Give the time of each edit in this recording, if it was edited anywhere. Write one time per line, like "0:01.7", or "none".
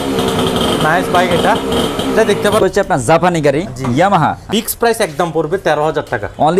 0:02.6
0:04.5